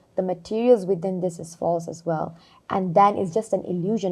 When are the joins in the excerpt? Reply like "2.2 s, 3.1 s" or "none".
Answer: none